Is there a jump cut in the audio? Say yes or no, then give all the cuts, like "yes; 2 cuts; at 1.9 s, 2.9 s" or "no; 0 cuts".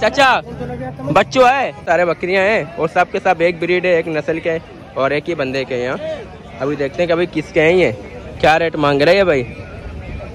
yes; 1 cut; at 1.8 s